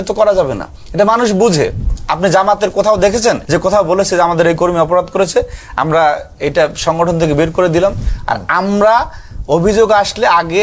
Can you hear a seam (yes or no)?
yes